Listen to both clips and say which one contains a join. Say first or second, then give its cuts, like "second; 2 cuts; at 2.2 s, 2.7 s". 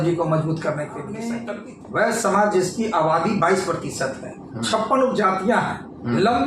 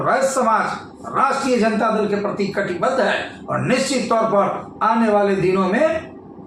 first; 1 cut; at 1.2 s